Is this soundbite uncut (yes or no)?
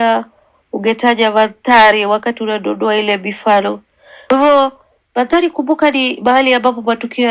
yes